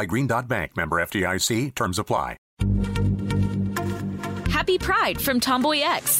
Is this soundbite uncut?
no; 1 cut; at 2.5 s

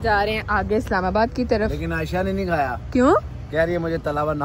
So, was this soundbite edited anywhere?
no; 0 cuts

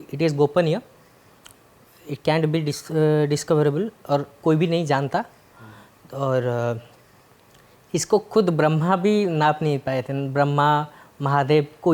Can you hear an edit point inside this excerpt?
no; 0 cuts

